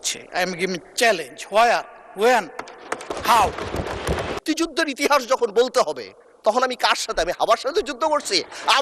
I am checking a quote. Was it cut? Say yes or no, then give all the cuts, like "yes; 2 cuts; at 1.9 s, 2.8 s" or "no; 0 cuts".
yes; 1 cut; at 4.4 s